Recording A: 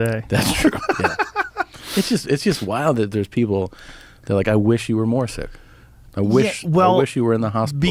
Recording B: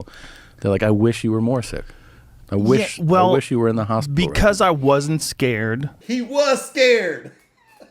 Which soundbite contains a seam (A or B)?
B